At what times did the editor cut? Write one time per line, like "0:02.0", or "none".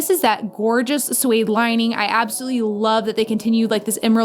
none